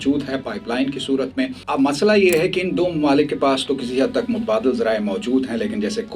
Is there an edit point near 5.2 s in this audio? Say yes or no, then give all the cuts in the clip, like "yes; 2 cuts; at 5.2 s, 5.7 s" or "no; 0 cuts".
no; 1 cut; at 1.6 s